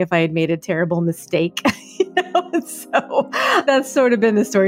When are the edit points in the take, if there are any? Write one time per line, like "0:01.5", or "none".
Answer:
0:03.6